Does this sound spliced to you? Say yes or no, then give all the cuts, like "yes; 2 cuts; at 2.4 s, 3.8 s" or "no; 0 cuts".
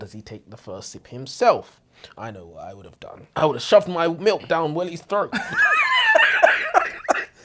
yes; 1 cut; at 3.3 s